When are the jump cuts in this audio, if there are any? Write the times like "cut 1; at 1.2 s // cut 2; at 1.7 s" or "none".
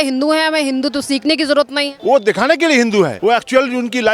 cut 1; at 1.9 s // cut 2; at 3.1 s